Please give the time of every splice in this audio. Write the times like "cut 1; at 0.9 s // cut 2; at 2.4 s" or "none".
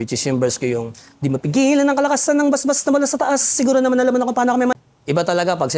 cut 1; at 4.7 s